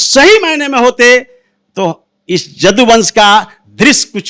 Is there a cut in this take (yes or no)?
no